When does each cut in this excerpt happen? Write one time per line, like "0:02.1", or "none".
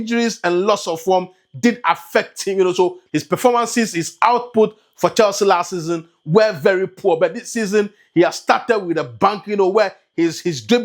0:03.0